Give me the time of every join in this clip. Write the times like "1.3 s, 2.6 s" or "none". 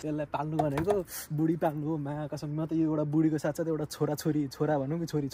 none